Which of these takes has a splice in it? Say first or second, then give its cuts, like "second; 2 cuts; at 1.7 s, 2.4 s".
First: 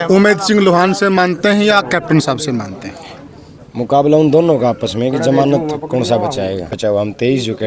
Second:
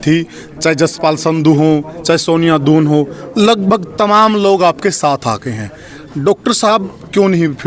first; 1 cut; at 6.7 s